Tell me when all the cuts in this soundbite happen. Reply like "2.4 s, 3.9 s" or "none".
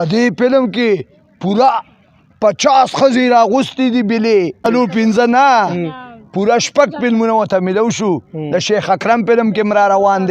4.6 s

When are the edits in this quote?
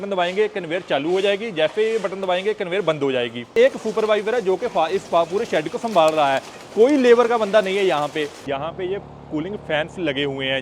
3.5 s, 8.5 s

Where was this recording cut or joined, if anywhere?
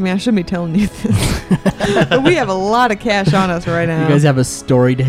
none

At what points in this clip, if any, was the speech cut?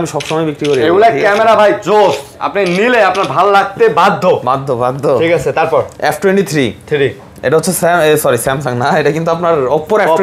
none

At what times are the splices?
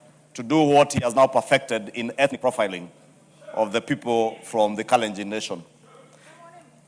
2.4 s

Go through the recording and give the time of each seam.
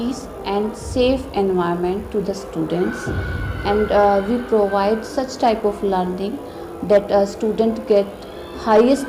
none

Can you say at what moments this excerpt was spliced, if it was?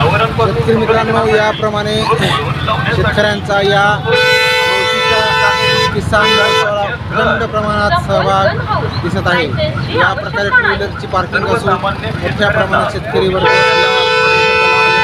none

